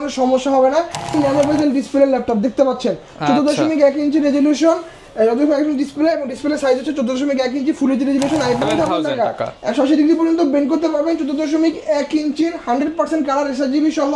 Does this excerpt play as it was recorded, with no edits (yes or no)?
no